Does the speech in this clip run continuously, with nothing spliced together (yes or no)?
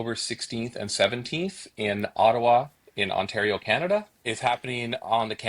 no